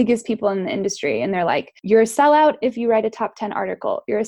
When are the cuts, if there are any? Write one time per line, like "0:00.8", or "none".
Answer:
0:01.7